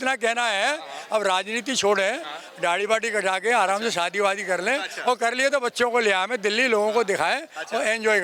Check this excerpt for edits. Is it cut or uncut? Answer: uncut